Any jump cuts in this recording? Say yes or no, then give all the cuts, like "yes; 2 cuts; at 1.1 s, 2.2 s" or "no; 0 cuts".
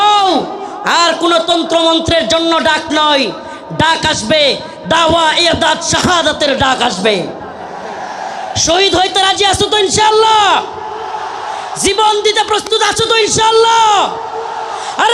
no; 0 cuts